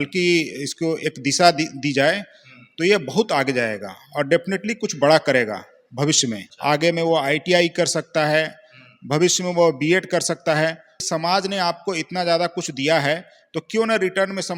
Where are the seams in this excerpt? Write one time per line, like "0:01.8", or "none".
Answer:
0:06.5
0:10.9

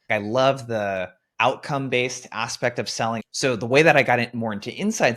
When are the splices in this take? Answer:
0:03.2

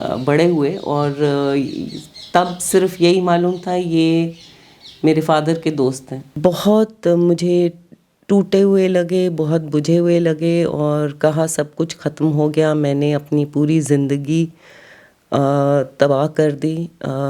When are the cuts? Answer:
0:06.3

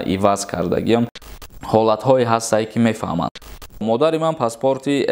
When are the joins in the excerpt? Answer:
0:01.2
0:03.4

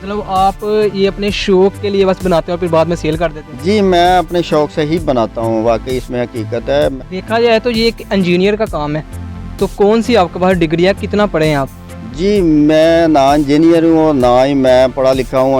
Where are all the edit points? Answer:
0:06.9

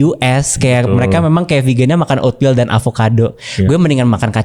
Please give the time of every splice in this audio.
none

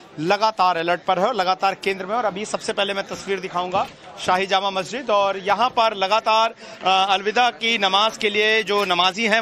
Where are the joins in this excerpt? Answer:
0:07.6

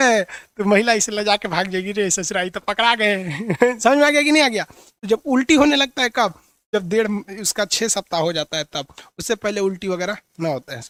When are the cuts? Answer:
none

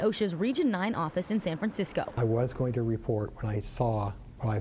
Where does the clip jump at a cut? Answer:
none

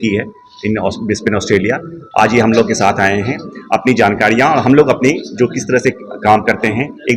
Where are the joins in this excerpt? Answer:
none

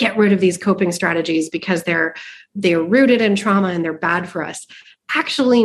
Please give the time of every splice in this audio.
none

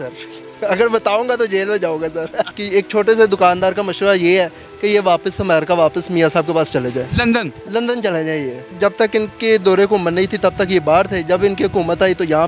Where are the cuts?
0:02.6
0:08.8

